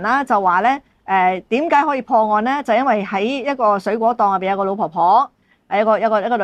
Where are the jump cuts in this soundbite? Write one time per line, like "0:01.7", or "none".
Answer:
none